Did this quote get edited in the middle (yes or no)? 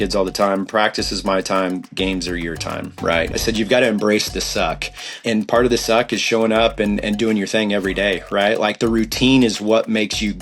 yes